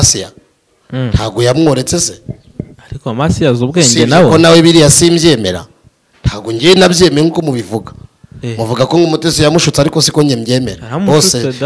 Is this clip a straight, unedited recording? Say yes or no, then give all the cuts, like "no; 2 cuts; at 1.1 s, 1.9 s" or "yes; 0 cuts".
yes; 0 cuts